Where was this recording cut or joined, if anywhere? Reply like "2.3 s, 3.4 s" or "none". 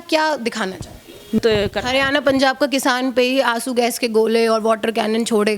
1.4 s